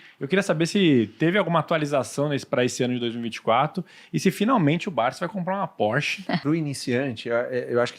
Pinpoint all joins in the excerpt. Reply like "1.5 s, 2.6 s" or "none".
6.4 s